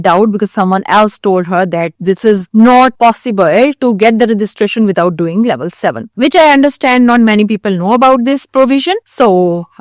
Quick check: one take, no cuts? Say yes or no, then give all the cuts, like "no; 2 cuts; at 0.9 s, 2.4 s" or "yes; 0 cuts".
yes; 0 cuts